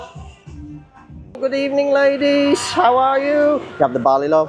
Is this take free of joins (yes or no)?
no